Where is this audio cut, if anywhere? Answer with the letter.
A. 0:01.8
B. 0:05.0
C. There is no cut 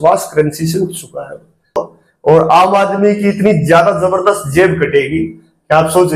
A